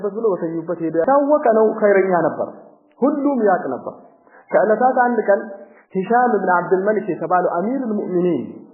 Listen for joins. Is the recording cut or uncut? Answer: cut